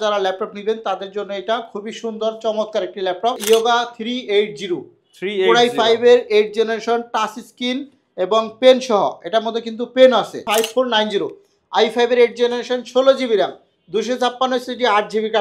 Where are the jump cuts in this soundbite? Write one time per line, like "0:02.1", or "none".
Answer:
0:03.4
0:10.4